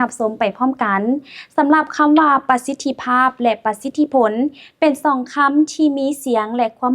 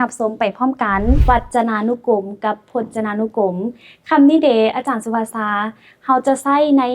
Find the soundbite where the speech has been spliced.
second; 1 cut; at 1.2 s

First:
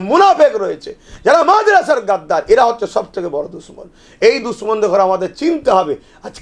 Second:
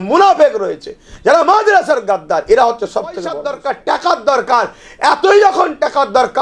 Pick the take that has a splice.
second; 1 cut; at 3.5 s

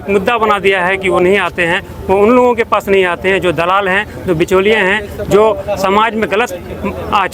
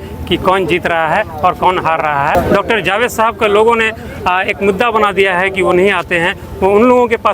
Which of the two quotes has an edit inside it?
second; 1 cut; at 2.3 s

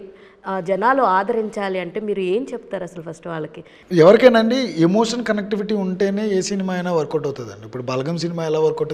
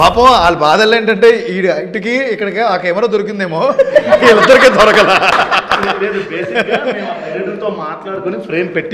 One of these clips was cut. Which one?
first; 1 cut; at 3.7 s

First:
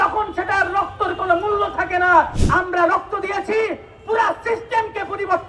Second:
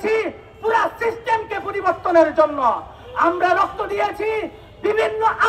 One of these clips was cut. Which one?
first; 1 cut; at 2.4 s

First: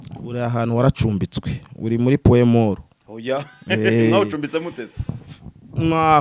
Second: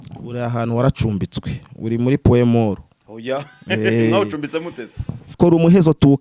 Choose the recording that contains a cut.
second; 1 cut; at 5.2 s

